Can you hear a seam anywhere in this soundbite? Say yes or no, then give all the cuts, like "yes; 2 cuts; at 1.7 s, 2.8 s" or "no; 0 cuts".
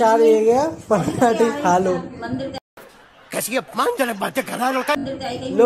no; 0 cuts